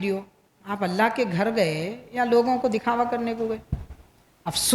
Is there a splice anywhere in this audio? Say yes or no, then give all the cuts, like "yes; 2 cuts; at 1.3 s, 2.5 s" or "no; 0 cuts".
no; 0 cuts